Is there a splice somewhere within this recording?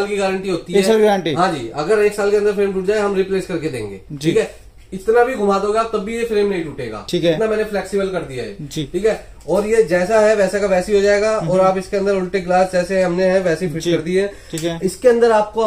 no; 0 cuts

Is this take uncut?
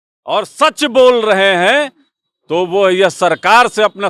yes; 0 cuts

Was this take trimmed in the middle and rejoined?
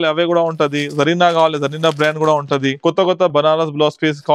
yes; 1 cut; at 2.8 s

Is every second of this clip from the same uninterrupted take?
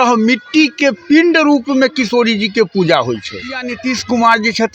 no; 1 cut; at 3.7 s

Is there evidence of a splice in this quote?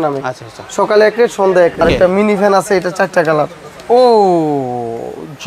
yes; 1 cut; at 1.8 s

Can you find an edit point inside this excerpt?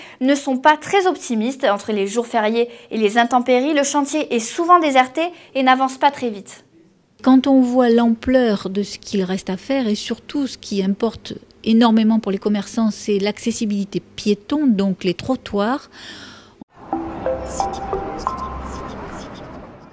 no; 0 cuts

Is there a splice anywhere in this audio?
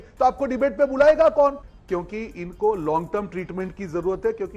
yes; 1 cut; at 1.7 s

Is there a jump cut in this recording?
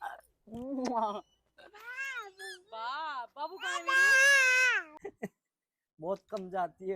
yes; 1 cut; at 4.9 s

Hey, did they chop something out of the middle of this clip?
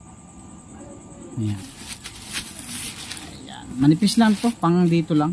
yes; 1 cut; at 1.6 s

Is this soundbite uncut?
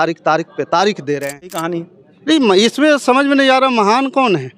no; 1 cut; at 1.6 s

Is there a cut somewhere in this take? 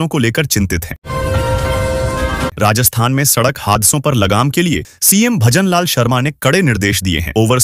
yes; 2 cuts; at 1.0 s, 2.5 s

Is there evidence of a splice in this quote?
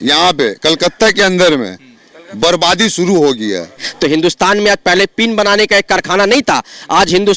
yes; 1 cut; at 3.9 s

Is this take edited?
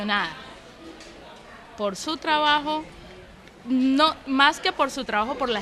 yes; 1 cut; at 4.5 s

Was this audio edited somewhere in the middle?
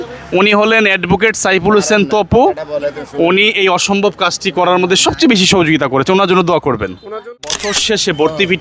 yes; 1 cut; at 7.2 s

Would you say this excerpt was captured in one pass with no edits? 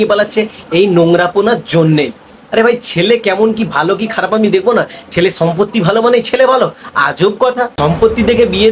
no; 1 cut; at 7.7 s

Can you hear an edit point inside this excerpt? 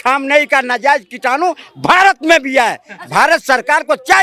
no; 0 cuts

